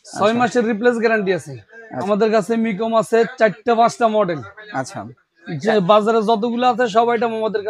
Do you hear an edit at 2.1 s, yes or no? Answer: yes